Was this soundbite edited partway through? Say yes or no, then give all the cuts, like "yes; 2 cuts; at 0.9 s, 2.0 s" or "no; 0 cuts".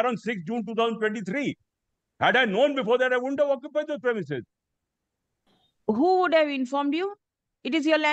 no; 0 cuts